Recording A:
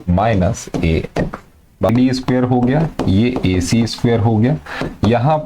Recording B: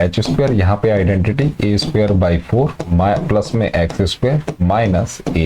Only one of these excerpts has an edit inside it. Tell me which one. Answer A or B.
A